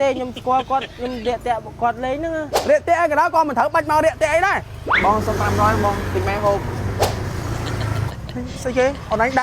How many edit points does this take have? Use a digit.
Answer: 4